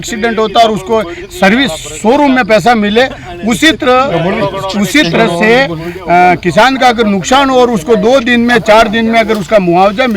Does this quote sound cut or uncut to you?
uncut